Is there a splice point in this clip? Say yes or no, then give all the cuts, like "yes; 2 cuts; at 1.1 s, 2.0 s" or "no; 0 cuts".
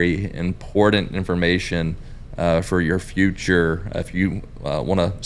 no; 0 cuts